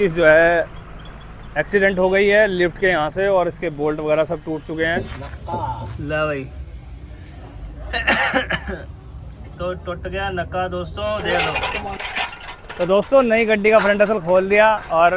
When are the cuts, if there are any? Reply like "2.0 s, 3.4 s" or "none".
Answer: 5.1 s, 11.4 s